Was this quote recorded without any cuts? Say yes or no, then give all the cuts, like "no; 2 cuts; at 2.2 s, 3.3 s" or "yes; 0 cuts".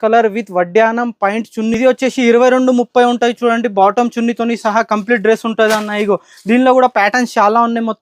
no; 1 cut; at 1.8 s